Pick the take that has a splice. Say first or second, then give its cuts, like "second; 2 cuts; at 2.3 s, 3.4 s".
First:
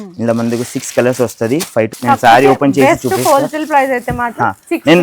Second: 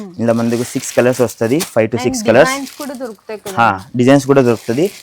first; 1 cut; at 1.9 s